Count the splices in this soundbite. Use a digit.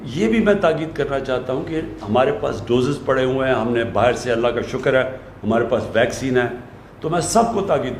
0